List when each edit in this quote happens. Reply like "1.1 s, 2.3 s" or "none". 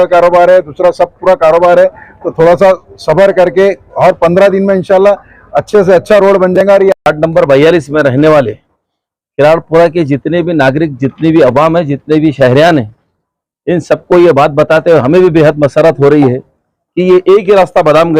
7.0 s